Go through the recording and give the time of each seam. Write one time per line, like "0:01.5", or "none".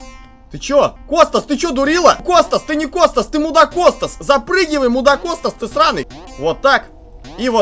0:01.0
0:02.2
0:06.1

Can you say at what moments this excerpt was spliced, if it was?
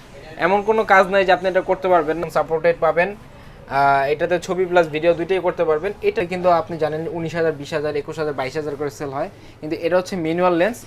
0:02.2
0:06.2

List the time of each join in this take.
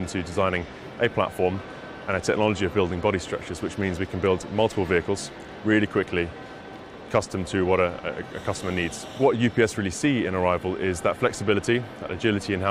0:09.2

